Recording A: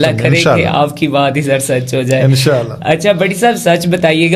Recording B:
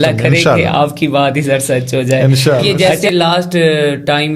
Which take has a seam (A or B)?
B